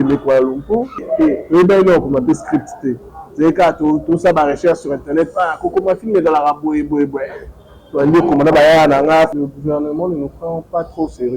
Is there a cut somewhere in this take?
yes; 2 cuts; at 1.0 s, 9.4 s

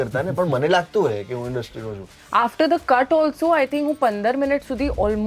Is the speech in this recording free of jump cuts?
no; 1 cut; at 2.1 s

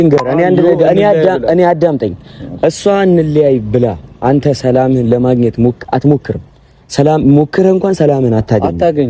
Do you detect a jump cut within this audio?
no; 0 cuts

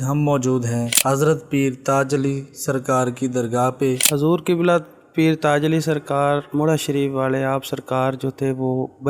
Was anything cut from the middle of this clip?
yes; 2 cuts; at 0.9 s, 4.0 s

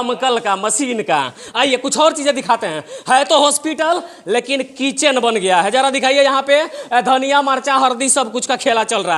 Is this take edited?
no; 0 cuts

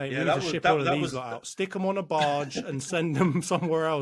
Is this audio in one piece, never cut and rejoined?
yes; 0 cuts

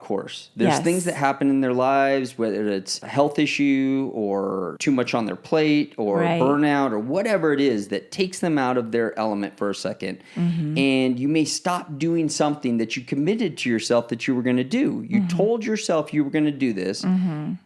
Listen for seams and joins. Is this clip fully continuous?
no; 2 cuts; at 3.0 s, 4.7 s

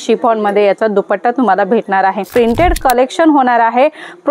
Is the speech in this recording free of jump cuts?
no; 1 cut; at 2.3 s

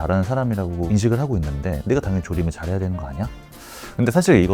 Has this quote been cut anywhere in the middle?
yes; 2 cuts; at 0.9 s, 3.5 s

